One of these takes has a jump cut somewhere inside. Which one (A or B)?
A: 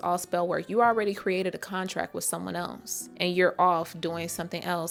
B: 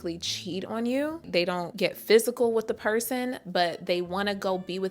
B